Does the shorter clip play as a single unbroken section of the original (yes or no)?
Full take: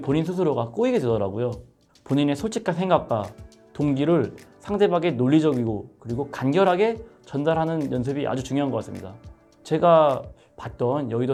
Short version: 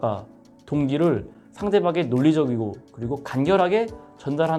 yes